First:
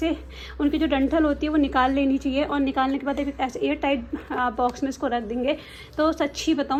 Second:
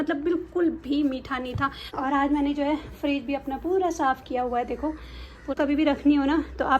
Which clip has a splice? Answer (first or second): second